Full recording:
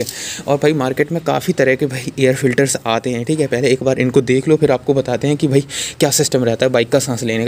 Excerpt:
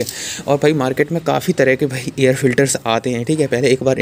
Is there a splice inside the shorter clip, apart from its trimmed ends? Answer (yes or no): no